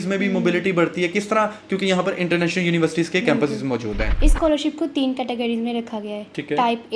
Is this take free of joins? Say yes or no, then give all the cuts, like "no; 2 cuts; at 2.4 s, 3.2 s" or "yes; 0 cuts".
no; 1 cut; at 4.1 s